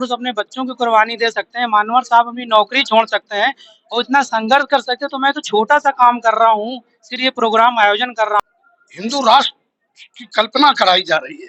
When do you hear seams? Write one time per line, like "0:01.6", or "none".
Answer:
0:08.4